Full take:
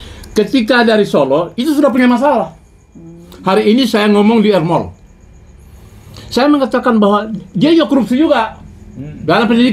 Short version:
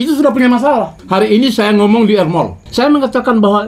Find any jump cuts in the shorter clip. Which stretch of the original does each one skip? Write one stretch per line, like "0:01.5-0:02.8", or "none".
0:02.6-0:03.3
0:05.0-0:06.2